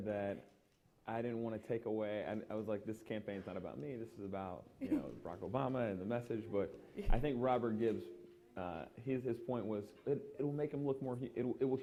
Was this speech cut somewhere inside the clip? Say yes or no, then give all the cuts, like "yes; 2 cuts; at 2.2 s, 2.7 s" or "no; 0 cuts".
no; 0 cuts